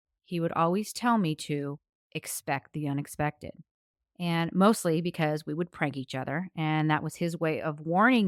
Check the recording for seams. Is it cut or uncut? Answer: uncut